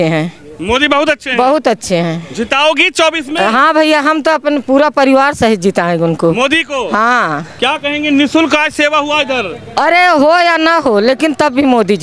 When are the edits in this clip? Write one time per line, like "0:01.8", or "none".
none